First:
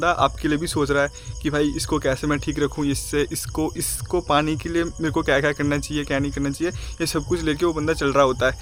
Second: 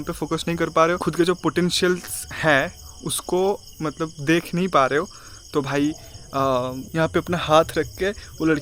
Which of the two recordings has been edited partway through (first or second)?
second